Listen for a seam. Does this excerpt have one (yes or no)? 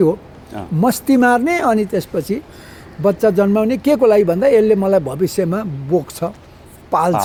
no